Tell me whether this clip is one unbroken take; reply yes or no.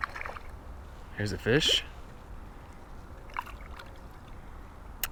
yes